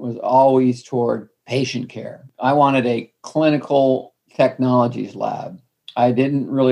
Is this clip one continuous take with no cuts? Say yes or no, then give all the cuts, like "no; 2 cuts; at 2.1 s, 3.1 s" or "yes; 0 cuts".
no; 2 cuts; at 1.3 s, 4.2 s